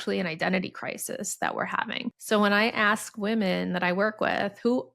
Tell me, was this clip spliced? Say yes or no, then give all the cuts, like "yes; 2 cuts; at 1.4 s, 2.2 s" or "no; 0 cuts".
yes; 1 cut; at 2.2 s